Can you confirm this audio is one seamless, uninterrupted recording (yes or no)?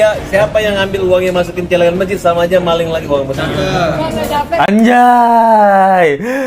yes